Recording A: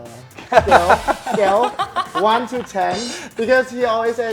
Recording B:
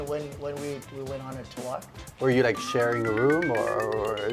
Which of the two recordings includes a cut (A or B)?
B